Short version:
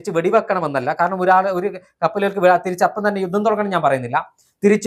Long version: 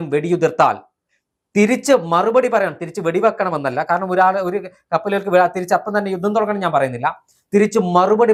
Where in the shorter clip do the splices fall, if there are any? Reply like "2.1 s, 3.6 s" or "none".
none